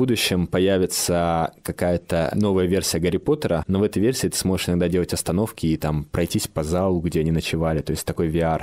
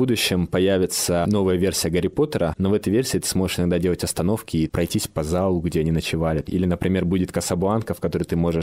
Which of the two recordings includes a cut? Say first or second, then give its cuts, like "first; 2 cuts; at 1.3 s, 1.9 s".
second; 3 cuts; at 1.2 s, 4.7 s, 6.4 s